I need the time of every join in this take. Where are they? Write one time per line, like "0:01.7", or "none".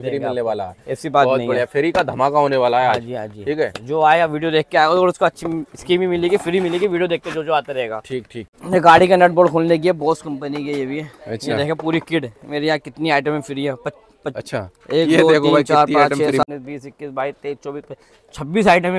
0:08.4
0:16.4